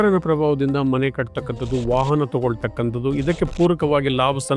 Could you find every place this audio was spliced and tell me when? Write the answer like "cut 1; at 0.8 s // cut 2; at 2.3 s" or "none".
none